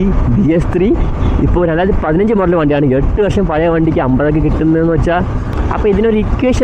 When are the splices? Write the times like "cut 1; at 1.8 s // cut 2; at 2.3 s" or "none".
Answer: cut 1; at 5.5 s